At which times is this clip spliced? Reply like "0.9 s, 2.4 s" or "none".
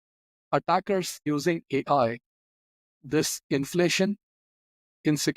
1.2 s